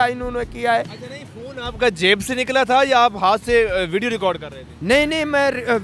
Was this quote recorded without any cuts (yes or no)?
yes